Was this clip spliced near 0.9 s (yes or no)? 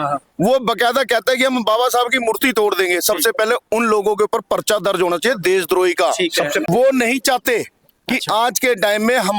no